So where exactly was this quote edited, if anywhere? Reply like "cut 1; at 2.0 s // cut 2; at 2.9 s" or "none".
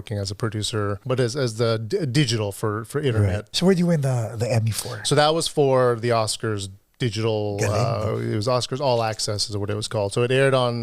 cut 1; at 1.0 s // cut 2; at 3.5 s